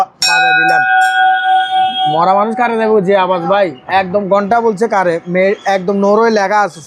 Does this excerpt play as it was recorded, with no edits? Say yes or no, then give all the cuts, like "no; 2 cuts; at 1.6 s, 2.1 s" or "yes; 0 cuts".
yes; 0 cuts